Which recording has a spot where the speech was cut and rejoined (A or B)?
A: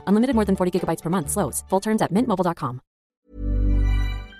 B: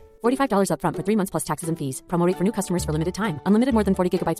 A